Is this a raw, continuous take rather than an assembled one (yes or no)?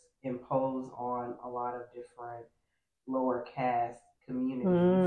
yes